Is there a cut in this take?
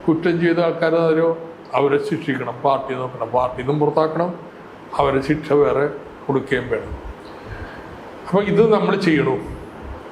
no; 0 cuts

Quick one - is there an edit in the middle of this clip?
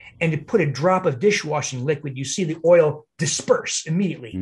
no; 0 cuts

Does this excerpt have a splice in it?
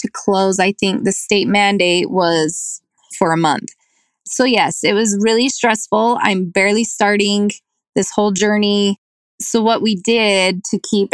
yes; 1 cut; at 2.8 s

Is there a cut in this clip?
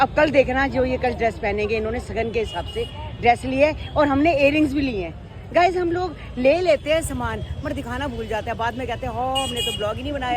no; 0 cuts

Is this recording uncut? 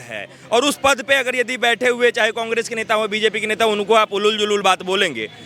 yes; 0 cuts

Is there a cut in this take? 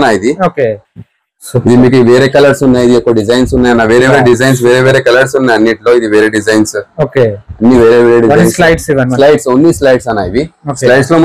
no; 0 cuts

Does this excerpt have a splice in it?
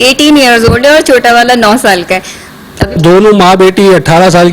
yes; 1 cut; at 3.0 s

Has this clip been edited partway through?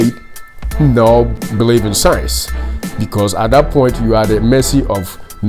yes; 1 cut; at 1.4 s

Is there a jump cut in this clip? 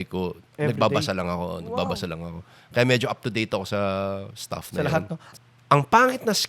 yes; 1 cut; at 5.2 s

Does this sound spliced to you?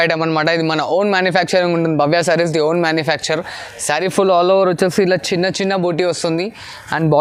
no; 0 cuts

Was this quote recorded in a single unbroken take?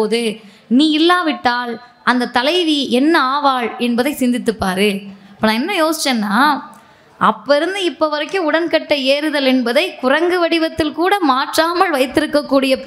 yes; 0 cuts

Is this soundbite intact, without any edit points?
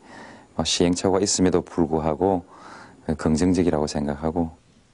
yes; 0 cuts

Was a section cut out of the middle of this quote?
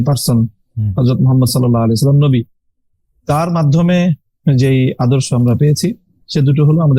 no; 0 cuts

